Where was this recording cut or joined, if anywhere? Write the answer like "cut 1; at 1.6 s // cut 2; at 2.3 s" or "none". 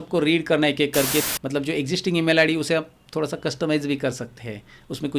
cut 1; at 1.3 s